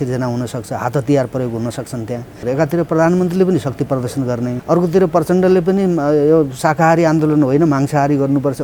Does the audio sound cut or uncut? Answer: cut